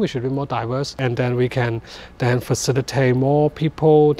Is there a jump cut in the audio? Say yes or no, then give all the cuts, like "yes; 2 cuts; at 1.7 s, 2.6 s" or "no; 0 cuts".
yes; 1 cut; at 1.0 s